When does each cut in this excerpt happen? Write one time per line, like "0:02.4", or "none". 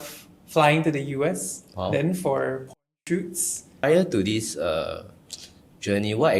0:03.8